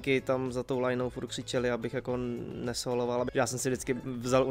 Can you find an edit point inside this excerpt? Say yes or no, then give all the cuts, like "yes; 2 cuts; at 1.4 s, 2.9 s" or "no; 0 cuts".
yes; 1 cut; at 3.3 s